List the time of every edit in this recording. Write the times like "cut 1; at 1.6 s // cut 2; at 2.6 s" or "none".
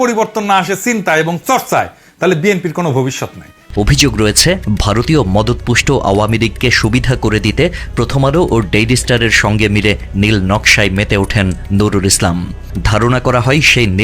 cut 1; at 3.6 s